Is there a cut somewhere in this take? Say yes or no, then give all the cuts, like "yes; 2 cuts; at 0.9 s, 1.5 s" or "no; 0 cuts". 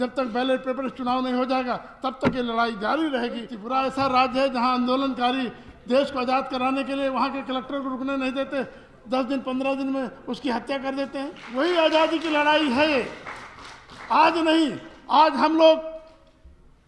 yes; 2 cuts; at 3.5 s, 11.4 s